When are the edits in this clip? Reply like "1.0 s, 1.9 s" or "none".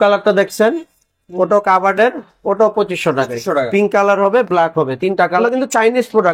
5.4 s